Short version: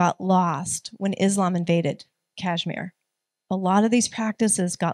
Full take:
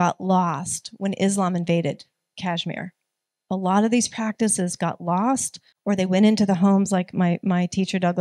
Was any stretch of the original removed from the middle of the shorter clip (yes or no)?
no